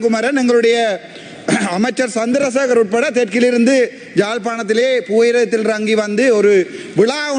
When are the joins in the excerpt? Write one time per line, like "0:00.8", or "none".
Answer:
none